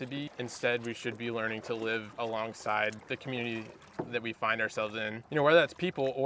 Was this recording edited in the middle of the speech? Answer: yes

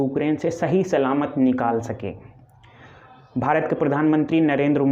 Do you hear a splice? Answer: no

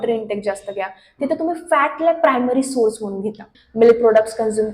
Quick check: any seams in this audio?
yes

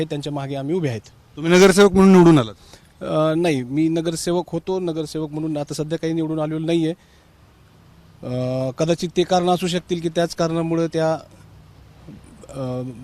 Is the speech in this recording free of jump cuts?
yes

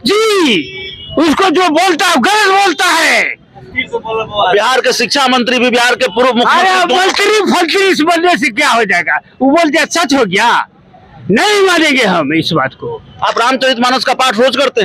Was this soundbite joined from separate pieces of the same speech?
no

